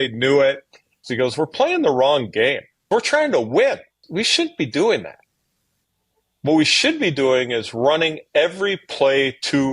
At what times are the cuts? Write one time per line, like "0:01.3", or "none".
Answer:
0:01.1
0:02.9
0:04.0